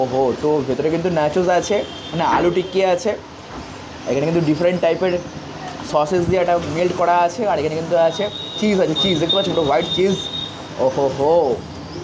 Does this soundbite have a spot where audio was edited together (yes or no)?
no